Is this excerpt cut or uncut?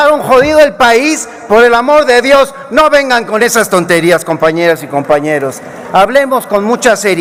uncut